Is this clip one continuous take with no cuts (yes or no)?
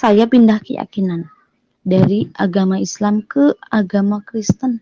yes